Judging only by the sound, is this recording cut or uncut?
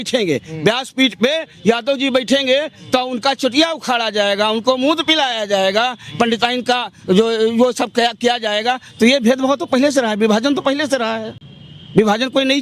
uncut